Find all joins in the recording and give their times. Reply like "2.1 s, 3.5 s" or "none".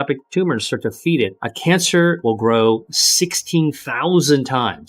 1.5 s, 2.2 s, 3.9 s